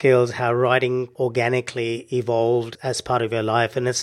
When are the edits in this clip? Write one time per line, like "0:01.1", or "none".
0:01.1
0:02.7